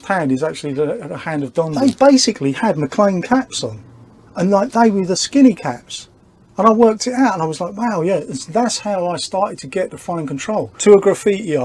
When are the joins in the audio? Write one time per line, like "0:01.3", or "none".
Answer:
0:01.7
0:10.7